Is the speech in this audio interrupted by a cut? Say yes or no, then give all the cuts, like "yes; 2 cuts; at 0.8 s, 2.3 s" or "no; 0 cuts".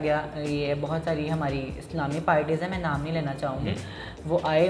no; 0 cuts